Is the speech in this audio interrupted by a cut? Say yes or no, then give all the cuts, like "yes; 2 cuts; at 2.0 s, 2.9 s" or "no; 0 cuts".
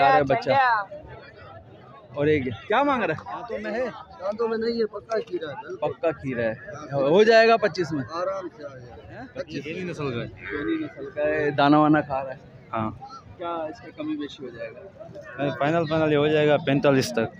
yes; 2 cuts; at 3.6 s, 9.6 s